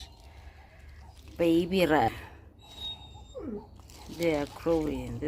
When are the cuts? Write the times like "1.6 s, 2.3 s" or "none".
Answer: 2.1 s